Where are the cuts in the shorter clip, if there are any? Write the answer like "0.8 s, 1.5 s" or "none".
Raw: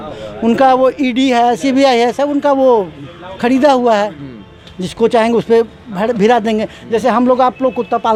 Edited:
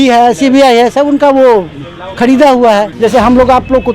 2.9 s

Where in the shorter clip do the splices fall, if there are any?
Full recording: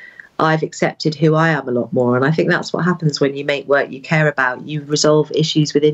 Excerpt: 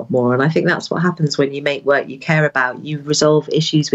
none

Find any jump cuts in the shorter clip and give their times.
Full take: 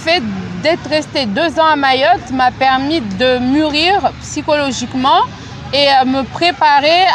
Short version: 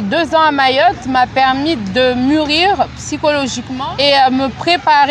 3.7 s

